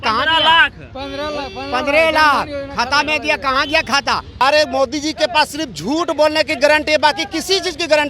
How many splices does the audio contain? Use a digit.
1